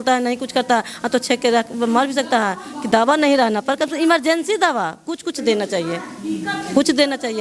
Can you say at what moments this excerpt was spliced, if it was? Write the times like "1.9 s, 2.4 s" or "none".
none

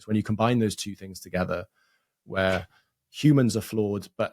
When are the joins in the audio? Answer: none

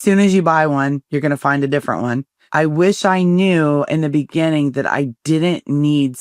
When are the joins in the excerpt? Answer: 2.4 s

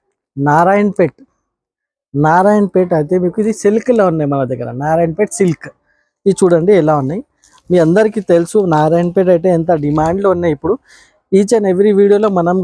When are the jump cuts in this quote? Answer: none

